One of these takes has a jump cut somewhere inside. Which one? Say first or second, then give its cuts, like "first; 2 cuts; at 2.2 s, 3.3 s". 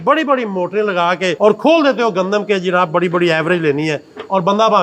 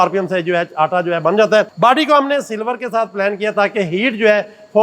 second; 1 cut; at 1.7 s